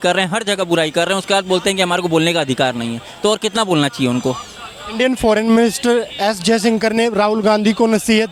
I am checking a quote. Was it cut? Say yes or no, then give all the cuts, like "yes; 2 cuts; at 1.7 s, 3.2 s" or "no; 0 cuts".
no; 0 cuts